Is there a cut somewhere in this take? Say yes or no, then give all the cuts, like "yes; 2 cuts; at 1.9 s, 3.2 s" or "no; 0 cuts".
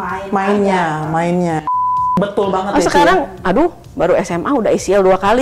yes; 1 cut; at 2.2 s